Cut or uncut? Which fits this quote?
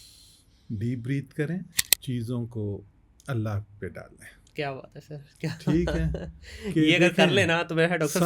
cut